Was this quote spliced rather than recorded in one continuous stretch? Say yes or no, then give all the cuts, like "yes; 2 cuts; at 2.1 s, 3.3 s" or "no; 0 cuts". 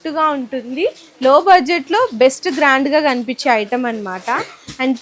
no; 0 cuts